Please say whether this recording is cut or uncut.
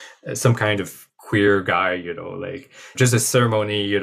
cut